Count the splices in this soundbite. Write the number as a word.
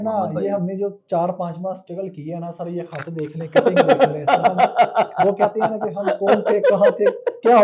zero